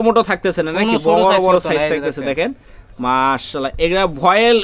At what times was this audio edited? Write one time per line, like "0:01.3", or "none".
none